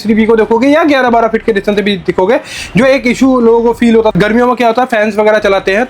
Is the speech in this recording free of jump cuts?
no; 1 cut; at 4.1 s

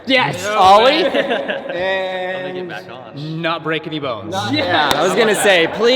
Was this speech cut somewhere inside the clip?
no; 0 cuts

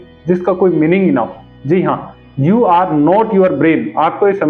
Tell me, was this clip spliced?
yes; 1 cut; at 1.6 s

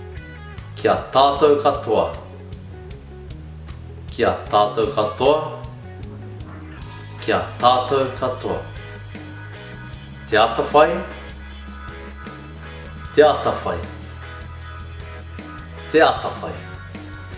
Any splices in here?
yes; 6 cuts; at 2.2 s, 4.1 s, 5.7 s, 7.2 s, 8.7 s, 10.3 s

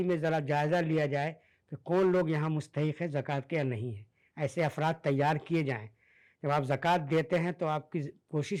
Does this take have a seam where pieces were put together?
no; 0 cuts

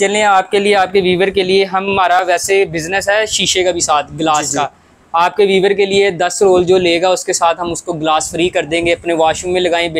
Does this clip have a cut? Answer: no; 0 cuts

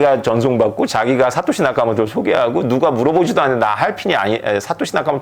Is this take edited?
no; 0 cuts

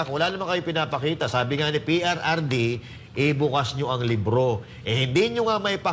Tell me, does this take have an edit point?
no; 0 cuts

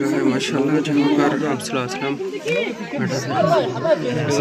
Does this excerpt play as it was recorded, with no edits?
yes; 0 cuts

